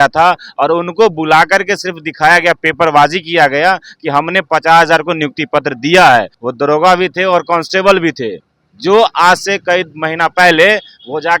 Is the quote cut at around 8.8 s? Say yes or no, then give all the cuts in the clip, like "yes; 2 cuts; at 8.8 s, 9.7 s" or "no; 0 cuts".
no; 1 cut; at 6.4 s